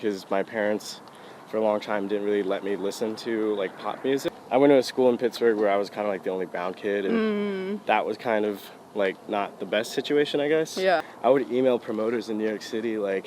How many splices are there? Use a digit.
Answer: 2